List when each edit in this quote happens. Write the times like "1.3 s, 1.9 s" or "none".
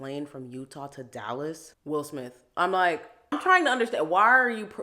1.7 s, 3.4 s